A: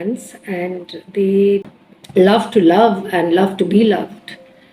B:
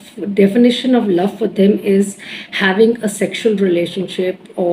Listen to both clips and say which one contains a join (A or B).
A